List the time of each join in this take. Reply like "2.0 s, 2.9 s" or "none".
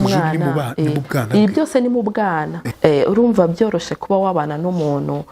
2.6 s